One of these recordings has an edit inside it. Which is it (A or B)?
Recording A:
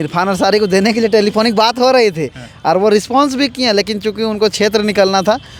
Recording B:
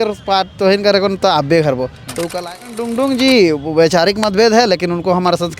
B